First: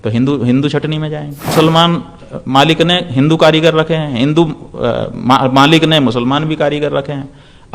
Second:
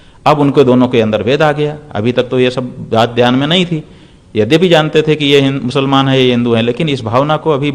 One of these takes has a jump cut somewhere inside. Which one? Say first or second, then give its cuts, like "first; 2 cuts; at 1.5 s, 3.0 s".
first; 1 cut; at 1.5 s